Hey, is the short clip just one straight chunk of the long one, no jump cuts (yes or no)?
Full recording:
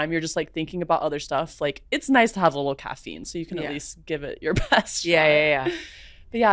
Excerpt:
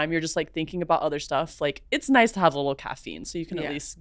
yes